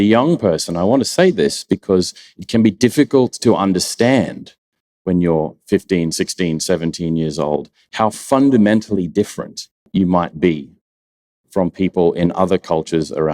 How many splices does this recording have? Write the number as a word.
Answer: one